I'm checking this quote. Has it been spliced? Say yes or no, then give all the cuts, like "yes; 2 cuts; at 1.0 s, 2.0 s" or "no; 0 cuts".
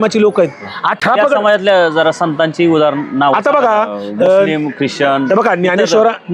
no; 0 cuts